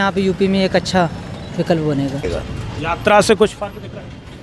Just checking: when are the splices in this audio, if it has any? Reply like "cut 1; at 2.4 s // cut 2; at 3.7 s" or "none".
none